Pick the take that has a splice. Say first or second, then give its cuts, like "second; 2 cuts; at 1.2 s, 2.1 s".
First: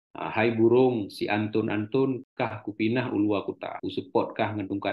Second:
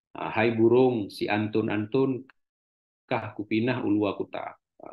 first; 2 cuts; at 2.3 s, 3.7 s